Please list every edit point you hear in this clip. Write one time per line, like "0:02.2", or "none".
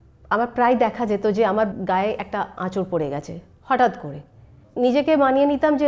0:01.7
0:04.6